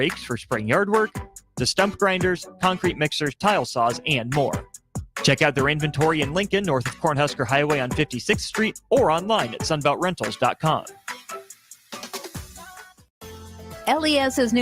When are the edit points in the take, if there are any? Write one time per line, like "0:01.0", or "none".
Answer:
0:13.1